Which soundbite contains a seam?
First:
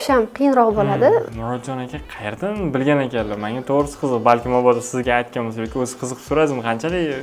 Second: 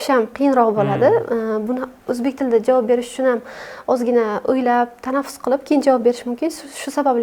first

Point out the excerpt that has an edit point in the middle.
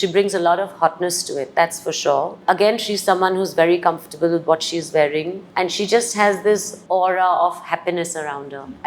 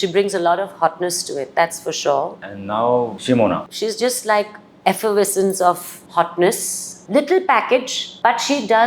second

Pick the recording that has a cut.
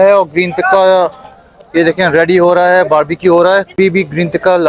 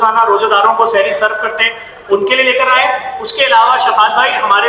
first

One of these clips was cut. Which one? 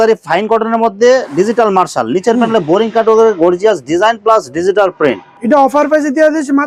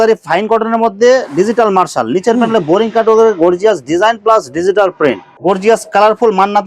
second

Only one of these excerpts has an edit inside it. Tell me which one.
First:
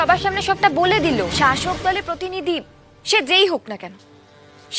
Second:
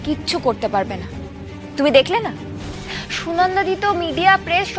first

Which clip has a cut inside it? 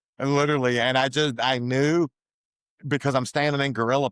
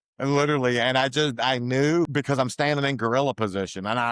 second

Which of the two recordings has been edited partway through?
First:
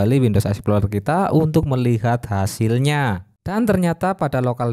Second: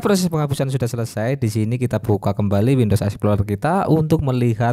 first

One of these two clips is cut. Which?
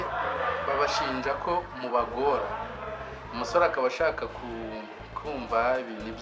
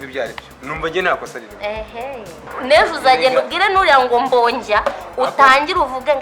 second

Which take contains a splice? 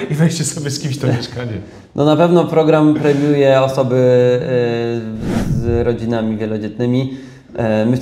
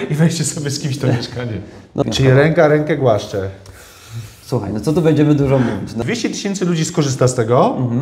second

